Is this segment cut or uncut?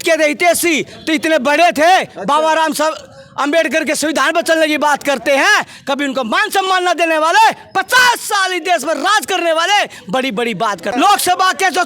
cut